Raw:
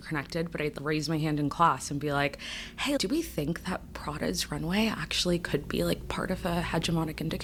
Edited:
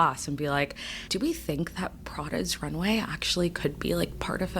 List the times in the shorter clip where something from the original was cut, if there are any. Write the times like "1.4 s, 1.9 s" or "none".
1.1 s